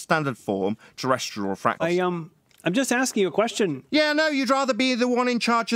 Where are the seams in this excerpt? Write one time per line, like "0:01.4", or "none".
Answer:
0:01.8